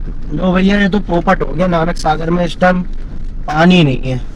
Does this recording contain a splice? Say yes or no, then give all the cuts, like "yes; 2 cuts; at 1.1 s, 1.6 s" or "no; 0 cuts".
no; 0 cuts